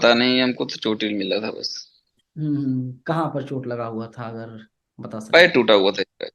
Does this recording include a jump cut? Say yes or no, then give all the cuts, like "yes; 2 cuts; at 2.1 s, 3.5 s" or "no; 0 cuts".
no; 0 cuts